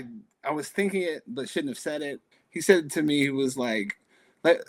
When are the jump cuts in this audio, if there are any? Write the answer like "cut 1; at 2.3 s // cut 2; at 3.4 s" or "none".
cut 1; at 2.2 s